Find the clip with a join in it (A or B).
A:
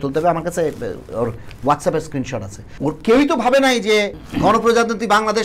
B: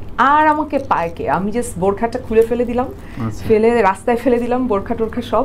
A